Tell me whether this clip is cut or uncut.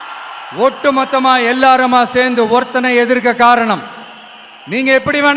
uncut